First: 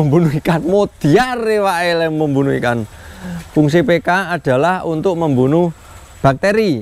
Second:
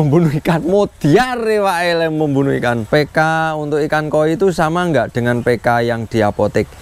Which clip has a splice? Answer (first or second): second